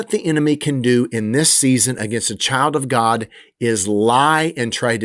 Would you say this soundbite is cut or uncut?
uncut